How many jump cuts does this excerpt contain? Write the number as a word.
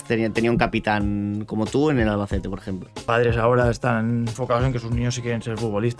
two